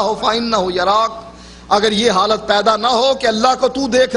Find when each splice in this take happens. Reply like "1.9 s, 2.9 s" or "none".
1.3 s